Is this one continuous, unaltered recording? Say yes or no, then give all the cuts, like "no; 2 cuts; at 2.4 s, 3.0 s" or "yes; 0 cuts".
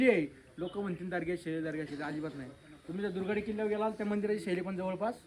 yes; 0 cuts